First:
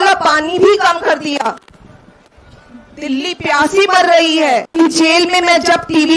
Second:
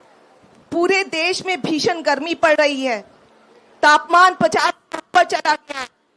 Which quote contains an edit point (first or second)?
first